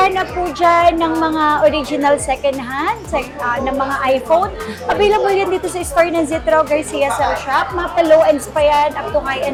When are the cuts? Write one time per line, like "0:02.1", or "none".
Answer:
none

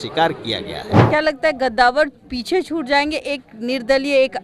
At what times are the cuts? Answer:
0:01.0

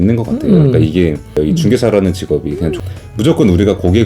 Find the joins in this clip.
0:01.4
0:02.7

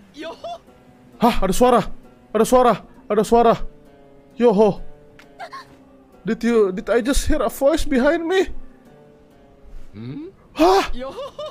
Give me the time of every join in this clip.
none

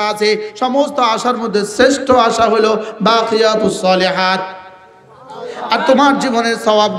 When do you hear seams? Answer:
none

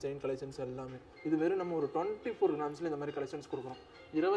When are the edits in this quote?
0:01.1

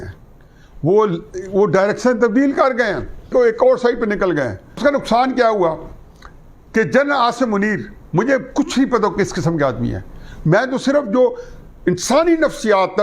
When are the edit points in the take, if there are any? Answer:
0:04.8

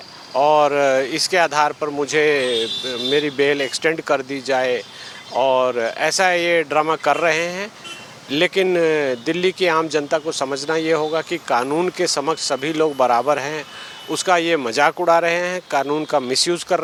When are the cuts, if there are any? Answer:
none

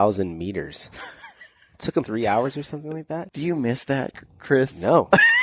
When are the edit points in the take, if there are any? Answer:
0:02.1
0:03.3

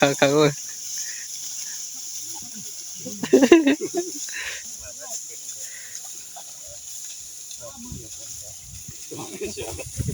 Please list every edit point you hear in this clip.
0:04.5

